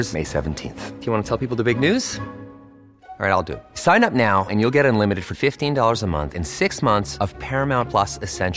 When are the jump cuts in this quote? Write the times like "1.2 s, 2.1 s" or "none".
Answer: none